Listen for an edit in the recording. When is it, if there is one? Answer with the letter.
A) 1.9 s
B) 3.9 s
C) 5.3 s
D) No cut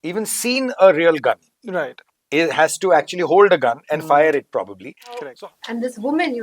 C